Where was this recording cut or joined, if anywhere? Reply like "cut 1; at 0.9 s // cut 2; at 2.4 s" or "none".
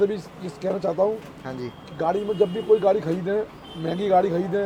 none